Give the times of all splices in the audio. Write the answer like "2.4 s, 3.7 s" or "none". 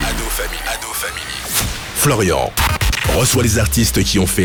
none